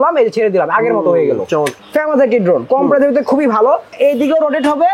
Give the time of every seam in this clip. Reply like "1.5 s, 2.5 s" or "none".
1.7 s, 3.9 s